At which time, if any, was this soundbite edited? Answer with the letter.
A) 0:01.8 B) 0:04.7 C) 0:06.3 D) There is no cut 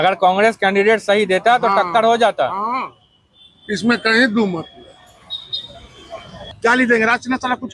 C